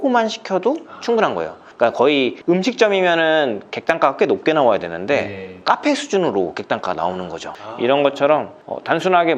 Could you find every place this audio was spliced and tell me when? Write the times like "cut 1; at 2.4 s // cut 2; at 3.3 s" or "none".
cut 1; at 7.5 s